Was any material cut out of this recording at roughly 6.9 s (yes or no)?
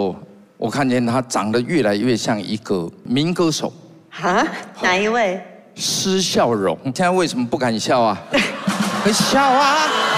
yes